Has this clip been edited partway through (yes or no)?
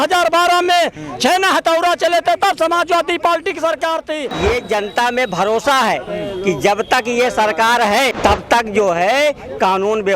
yes